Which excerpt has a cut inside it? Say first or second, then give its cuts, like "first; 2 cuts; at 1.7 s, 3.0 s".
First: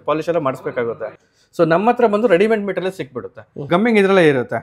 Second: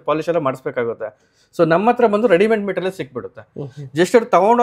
first; 1 cut; at 3.6 s